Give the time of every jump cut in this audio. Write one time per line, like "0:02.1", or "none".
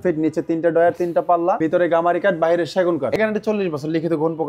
0:01.6
0:03.1